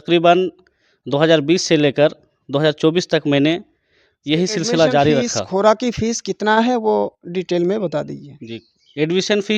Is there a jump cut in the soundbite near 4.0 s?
no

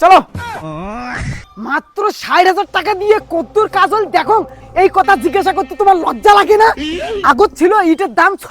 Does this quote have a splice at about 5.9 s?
no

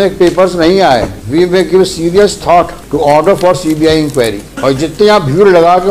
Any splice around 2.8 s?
yes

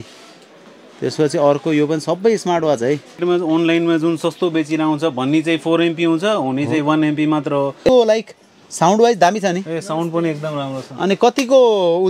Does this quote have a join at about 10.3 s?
no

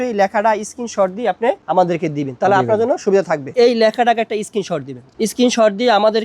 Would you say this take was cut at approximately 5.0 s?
yes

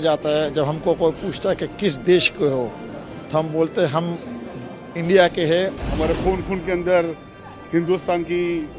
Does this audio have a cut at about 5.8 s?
yes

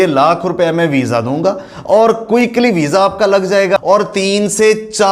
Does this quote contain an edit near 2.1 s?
no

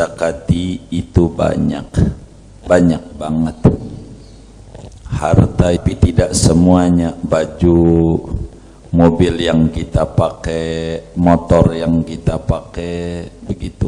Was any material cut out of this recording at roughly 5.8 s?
yes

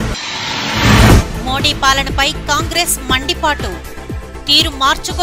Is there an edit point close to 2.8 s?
no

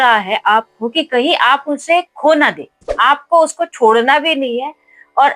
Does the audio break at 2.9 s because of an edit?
yes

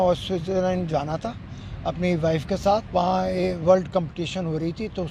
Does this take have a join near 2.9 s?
yes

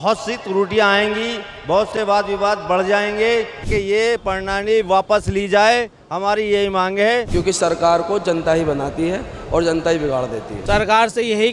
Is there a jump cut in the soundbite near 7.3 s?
yes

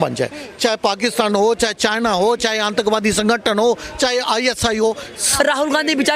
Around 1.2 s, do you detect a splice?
no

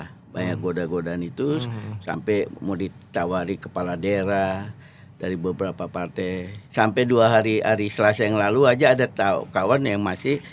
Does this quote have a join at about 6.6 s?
yes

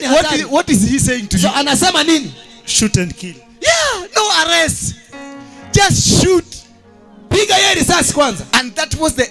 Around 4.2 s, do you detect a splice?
no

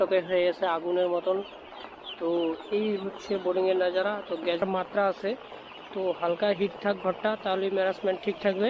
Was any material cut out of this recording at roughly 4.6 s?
yes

